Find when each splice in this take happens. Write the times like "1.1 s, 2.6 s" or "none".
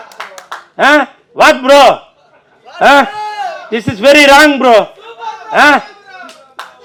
none